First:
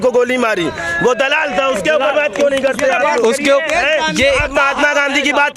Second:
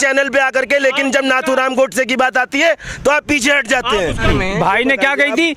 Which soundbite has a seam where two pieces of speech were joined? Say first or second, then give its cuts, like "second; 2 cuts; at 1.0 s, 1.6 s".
second; 1 cut; at 4.2 s